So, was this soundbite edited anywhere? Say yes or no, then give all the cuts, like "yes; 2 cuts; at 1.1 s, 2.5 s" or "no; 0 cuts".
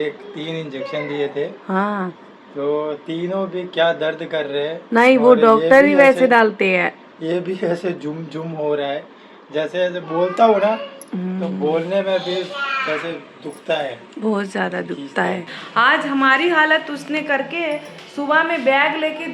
yes; 1 cut; at 15.6 s